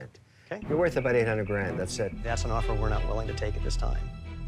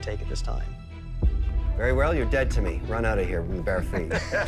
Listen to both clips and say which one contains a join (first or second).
first